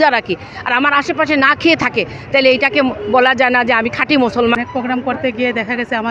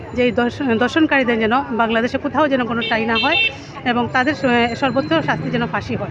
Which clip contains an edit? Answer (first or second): first